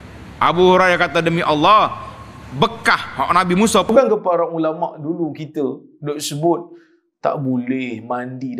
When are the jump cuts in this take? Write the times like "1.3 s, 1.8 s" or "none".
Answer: 3.9 s